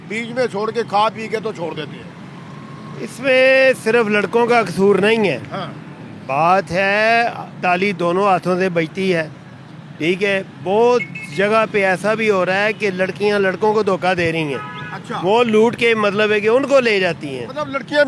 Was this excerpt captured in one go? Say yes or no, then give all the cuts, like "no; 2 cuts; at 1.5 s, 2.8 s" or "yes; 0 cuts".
yes; 0 cuts